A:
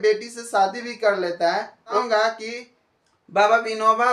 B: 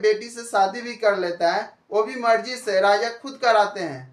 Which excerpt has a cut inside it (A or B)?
A